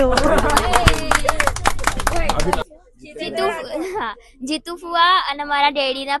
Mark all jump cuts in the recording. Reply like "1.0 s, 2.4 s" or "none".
2.6 s